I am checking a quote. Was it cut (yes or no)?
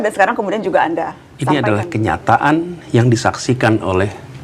yes